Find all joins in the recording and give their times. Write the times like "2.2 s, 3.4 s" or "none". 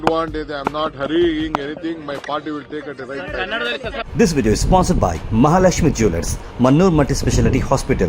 4.0 s